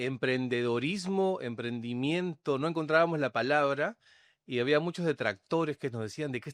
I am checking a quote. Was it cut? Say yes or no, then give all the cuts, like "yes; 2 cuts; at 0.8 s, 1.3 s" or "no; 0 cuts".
no; 0 cuts